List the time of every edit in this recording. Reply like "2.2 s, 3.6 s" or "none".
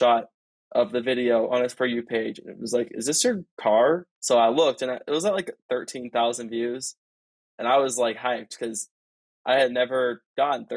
4.1 s